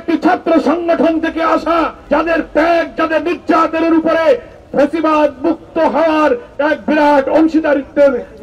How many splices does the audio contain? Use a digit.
1